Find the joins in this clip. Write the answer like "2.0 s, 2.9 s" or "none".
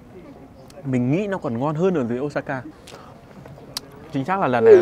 2.7 s